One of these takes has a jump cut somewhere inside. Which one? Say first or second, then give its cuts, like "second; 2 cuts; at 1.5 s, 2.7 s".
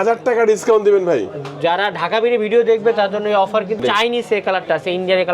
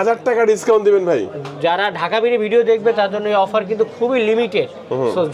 first; 1 cut; at 3.8 s